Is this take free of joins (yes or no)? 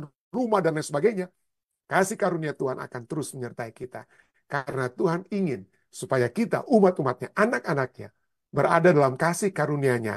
yes